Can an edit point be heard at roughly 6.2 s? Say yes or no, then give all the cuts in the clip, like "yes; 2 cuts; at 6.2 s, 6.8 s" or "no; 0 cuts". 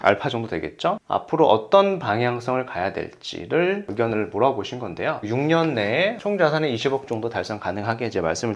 yes; 2 cuts; at 5.2 s, 6.2 s